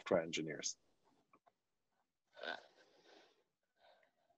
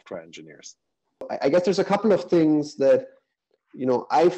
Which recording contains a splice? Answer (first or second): second